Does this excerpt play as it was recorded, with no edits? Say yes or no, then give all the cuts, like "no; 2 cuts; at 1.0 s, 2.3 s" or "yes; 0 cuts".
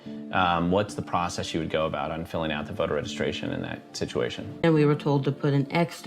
no; 1 cut; at 4.6 s